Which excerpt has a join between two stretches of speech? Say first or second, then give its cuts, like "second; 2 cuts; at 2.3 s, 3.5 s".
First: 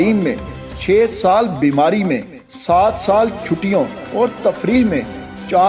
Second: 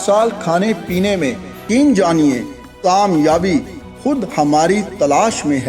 second; 1 cut; at 1.7 s